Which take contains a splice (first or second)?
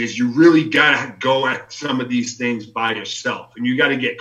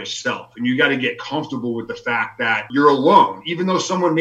second